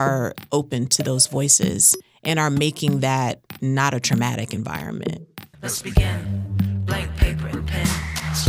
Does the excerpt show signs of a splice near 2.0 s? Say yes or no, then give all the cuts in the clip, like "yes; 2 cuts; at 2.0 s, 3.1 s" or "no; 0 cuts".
no; 1 cut; at 5.4 s